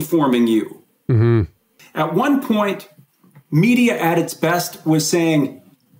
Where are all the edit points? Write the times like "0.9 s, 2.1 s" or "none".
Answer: 1.6 s